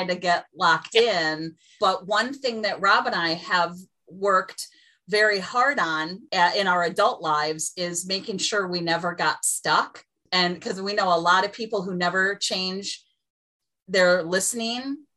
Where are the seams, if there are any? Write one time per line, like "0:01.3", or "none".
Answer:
0:01.7
0:06.2
0:10.2

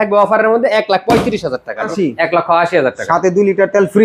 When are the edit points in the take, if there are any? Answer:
0:01.9

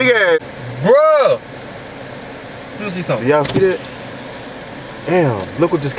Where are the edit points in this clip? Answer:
none

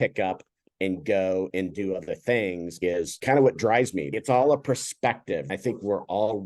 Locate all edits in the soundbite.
0:02.8
0:04.1
0:05.5

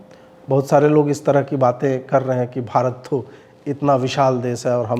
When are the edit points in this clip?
none

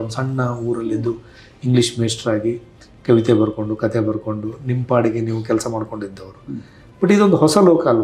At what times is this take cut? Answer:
none

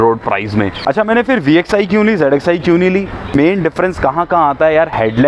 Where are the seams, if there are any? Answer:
0:01.0
0:03.3

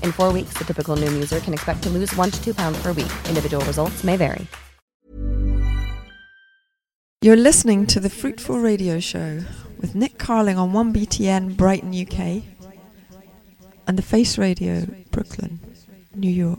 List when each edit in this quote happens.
0:07.2

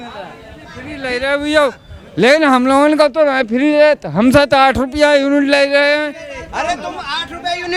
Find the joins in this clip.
none

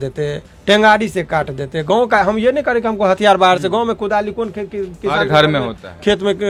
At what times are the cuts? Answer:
none

